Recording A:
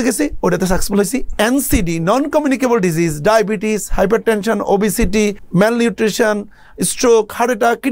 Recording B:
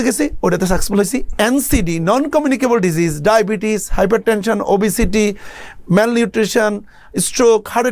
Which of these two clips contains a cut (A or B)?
A